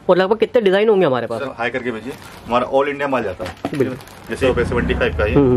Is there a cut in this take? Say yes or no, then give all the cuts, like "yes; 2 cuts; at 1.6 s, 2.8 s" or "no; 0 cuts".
yes; 2 cuts; at 1.5 s, 4.4 s